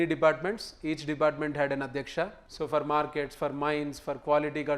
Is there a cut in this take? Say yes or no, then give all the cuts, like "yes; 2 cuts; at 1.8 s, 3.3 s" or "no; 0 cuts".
yes; 1 cut; at 2.4 s